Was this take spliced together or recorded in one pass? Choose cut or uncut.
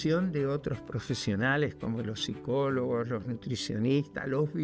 uncut